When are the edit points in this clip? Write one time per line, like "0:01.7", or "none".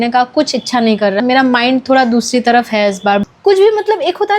0:01.2
0:03.2